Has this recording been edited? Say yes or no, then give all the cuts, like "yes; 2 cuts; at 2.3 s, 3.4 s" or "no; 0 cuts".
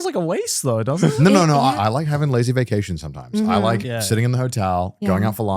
yes; 1 cut; at 1.8 s